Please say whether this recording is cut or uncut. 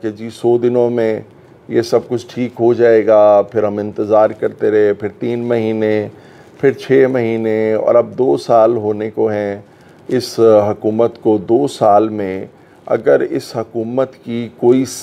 uncut